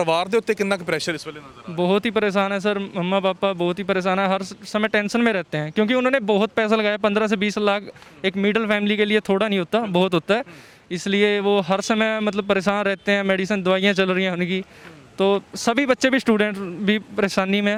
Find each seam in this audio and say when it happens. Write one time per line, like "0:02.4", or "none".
none